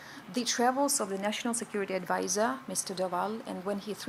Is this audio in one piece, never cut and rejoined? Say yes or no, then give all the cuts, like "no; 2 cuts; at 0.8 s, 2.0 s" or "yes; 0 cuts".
yes; 0 cuts